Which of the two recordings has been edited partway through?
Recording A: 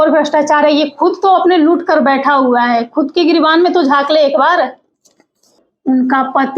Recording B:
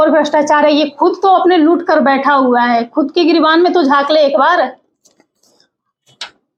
A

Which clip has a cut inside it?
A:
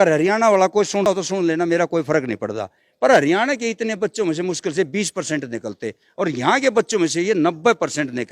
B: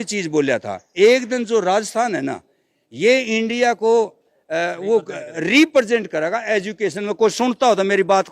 A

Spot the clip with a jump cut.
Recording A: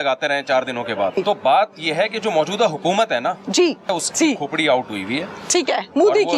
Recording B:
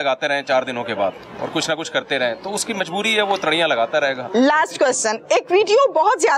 A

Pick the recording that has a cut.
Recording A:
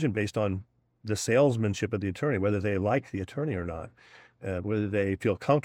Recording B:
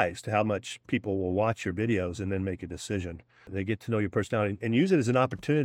B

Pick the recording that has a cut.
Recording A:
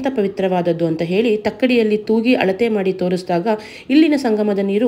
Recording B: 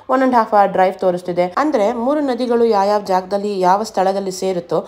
B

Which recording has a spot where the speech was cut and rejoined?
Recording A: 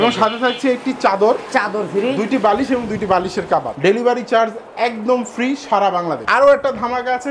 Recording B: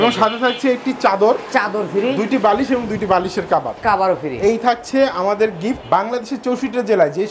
A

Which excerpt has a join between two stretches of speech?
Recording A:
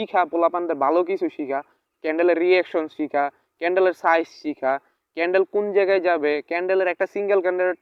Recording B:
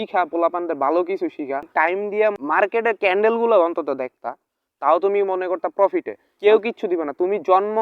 B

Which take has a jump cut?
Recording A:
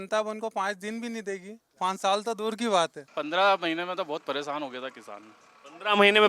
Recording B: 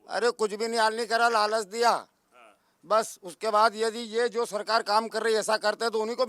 A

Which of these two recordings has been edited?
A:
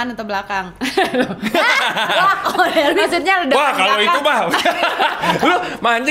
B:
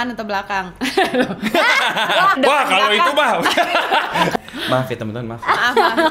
B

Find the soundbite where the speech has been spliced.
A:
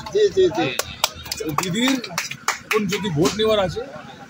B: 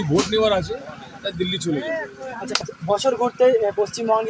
B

